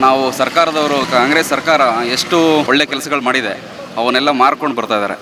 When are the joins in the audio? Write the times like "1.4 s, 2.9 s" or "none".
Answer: 1.0 s, 2.7 s